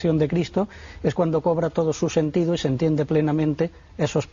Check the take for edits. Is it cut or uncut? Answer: uncut